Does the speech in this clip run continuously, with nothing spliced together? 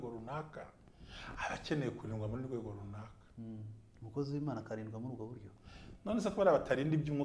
yes; 0 cuts

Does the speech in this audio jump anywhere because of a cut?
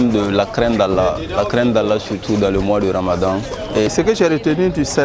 yes; 1 cut; at 3.9 s

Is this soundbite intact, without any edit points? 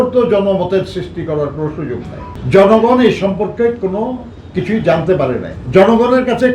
no; 2 cuts; at 2.3 s, 5.5 s

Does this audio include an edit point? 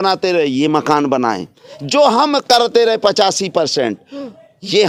no; 0 cuts

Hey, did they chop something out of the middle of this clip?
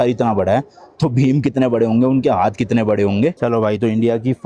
yes; 1 cut; at 3.4 s

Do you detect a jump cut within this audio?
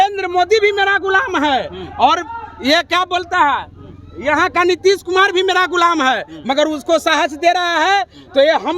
no; 0 cuts

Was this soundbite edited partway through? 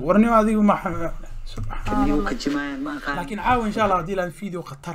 yes; 1 cut; at 3.3 s

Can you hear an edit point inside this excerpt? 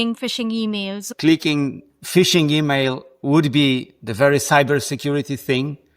yes; 1 cut; at 1.0 s

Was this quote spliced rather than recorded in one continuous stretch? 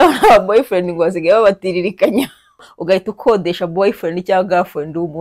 yes; 1 cut; at 2.7 s

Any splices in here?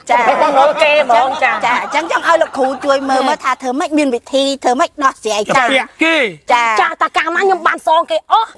no; 0 cuts

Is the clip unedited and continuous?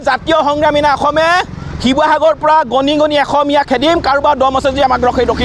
yes; 0 cuts

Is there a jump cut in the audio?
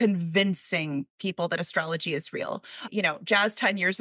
yes; 1 cut; at 2.9 s

